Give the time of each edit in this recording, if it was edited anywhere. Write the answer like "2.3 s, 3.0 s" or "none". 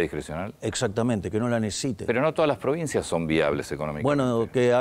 none